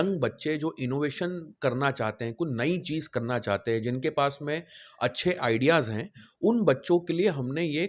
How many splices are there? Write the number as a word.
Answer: zero